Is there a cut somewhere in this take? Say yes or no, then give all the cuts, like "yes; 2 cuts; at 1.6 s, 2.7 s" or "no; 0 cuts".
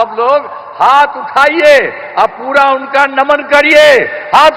no; 0 cuts